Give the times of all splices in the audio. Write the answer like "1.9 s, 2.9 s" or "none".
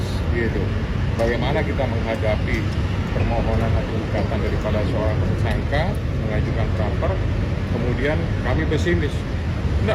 none